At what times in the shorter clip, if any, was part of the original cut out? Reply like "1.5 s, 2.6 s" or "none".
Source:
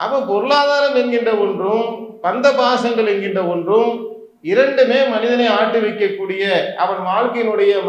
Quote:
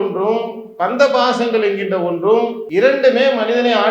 2.6 s